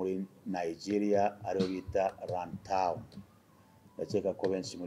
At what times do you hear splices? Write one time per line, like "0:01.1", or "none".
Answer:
none